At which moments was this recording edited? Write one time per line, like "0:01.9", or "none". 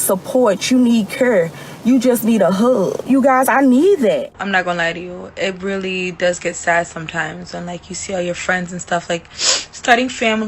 0:03.0
0:04.4